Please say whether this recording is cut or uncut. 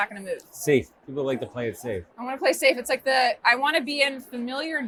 uncut